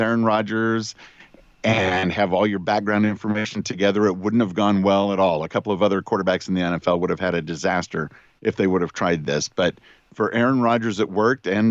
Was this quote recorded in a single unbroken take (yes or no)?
yes